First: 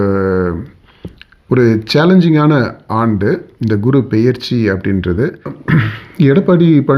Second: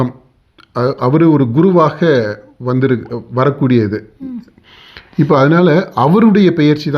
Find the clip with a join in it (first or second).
first